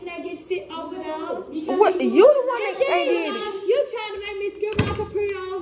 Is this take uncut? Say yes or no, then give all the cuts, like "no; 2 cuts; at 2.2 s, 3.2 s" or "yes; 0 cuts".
yes; 0 cuts